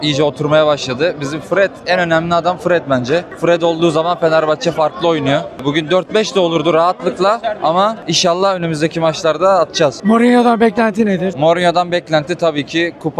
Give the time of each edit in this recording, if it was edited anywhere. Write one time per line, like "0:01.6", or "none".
none